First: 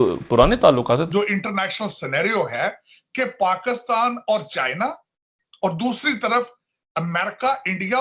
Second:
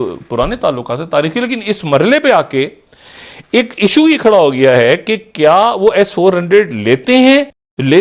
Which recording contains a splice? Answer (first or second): first